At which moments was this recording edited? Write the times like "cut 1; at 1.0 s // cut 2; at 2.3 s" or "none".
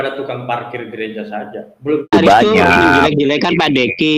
cut 1; at 2.1 s